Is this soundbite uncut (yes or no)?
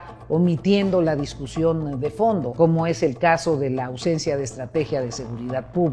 no